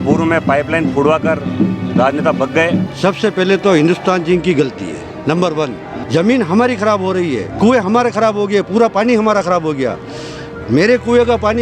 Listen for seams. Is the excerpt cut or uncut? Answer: cut